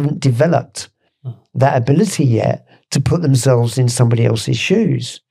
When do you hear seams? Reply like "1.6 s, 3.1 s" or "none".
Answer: none